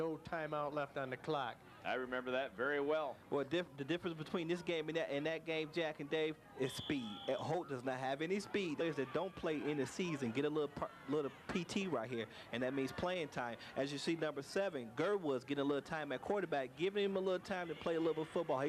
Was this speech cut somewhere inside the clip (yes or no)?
no